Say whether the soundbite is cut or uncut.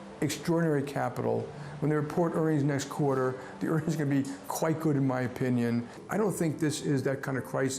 cut